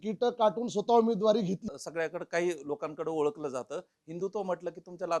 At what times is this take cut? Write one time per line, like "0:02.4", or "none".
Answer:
0:01.7